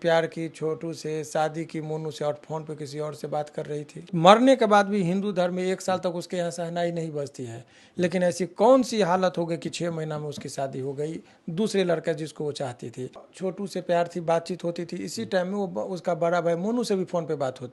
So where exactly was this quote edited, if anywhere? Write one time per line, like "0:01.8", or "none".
0:04.1
0:13.2